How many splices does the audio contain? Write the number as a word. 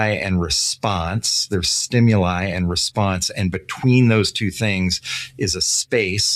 zero